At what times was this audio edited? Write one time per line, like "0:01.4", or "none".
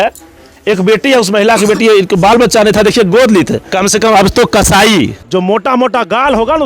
0:03.7
0:05.2